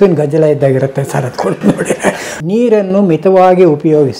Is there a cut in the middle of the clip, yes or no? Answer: yes